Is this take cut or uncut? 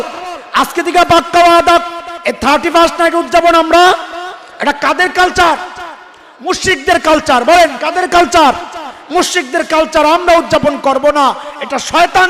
uncut